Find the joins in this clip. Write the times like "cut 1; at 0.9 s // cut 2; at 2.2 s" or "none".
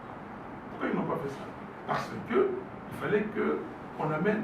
none